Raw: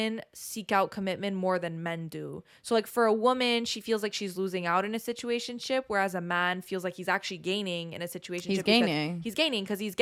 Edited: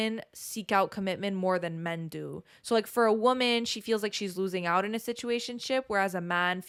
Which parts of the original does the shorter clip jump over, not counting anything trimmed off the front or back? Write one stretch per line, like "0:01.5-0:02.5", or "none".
none